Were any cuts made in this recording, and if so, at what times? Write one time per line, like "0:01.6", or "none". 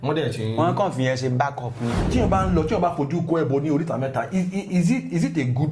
0:02.0